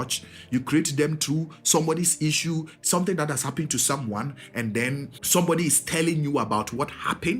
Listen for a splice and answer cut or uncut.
cut